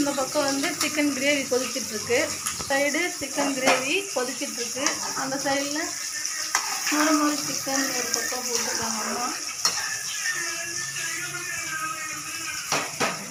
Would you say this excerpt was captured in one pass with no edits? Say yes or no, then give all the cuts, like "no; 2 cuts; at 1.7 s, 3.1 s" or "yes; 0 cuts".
yes; 0 cuts